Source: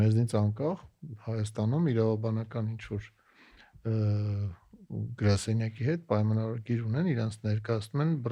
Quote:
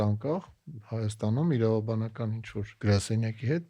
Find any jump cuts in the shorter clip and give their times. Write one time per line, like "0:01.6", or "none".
0:02.7